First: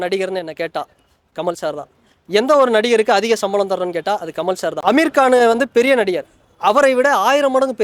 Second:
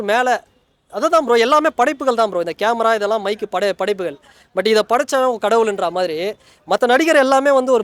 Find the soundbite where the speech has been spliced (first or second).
first